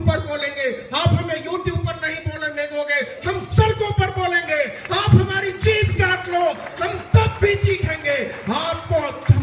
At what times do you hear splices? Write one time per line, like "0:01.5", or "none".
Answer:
none

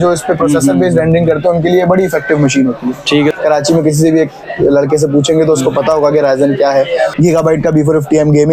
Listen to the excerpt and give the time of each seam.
0:03.3
0:07.1

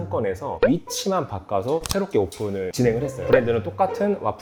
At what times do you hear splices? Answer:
none

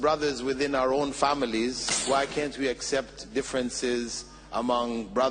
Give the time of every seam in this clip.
0:01.9

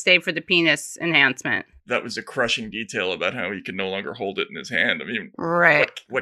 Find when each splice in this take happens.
0:01.8

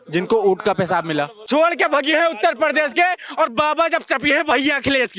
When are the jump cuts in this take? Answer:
0:01.4

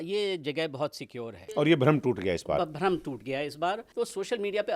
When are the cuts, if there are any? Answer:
0:01.5
0:03.9

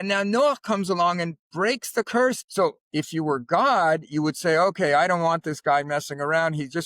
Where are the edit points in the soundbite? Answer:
0:02.4

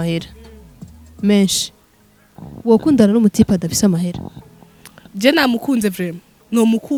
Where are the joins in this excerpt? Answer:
none

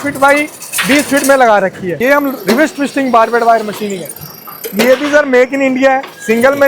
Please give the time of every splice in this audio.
0:01.9

